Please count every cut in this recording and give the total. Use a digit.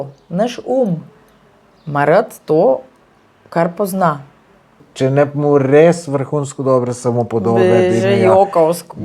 1